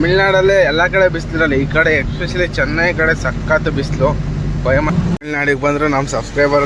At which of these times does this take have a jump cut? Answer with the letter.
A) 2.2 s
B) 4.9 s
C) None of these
B